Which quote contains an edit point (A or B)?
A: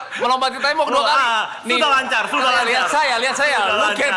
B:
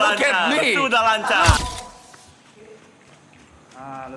B